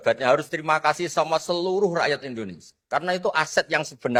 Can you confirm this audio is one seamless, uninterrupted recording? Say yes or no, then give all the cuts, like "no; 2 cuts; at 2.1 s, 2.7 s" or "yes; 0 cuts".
yes; 0 cuts